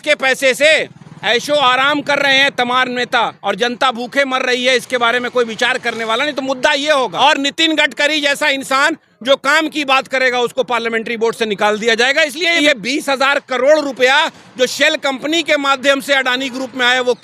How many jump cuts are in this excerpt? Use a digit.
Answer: 2